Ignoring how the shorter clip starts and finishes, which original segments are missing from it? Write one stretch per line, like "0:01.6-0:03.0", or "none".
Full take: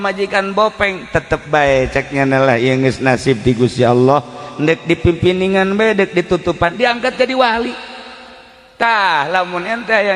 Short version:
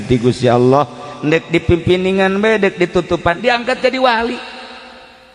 none